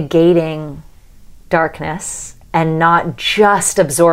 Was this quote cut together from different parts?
no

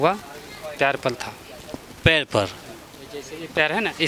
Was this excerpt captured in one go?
yes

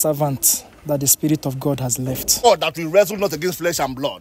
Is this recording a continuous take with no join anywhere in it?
no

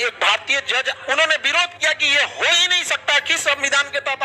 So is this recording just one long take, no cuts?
no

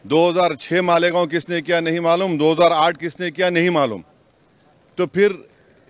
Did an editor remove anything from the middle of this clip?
no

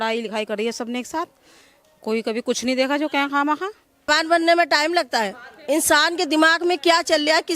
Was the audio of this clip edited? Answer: yes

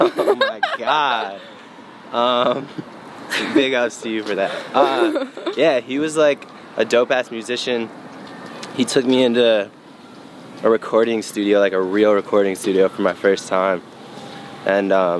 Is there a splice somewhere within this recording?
no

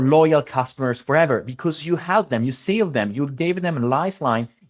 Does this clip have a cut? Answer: no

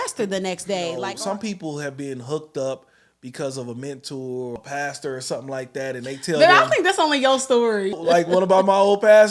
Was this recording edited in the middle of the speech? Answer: yes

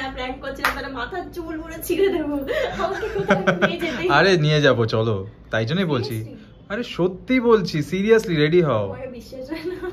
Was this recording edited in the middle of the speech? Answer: no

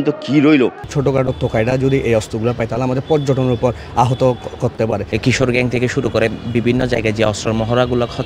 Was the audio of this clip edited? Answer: yes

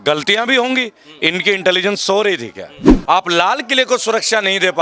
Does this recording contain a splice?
yes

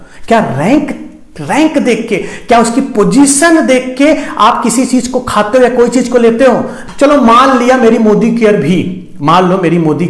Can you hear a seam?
yes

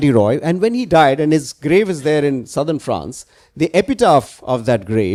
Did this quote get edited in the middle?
no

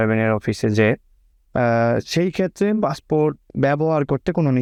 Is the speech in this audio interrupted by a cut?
no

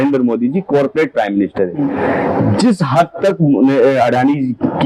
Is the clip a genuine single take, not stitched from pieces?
yes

